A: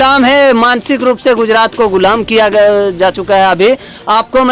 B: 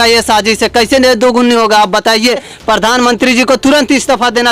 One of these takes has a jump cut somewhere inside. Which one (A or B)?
B